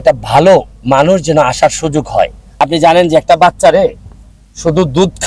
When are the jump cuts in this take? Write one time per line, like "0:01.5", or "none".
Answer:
0:02.4